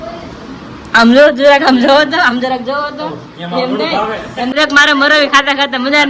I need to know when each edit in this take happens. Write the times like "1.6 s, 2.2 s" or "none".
4.5 s